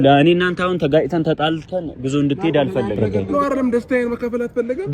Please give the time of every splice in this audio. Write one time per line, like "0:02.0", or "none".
0:03.1